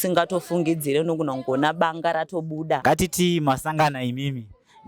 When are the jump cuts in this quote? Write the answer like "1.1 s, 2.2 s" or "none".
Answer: 2.8 s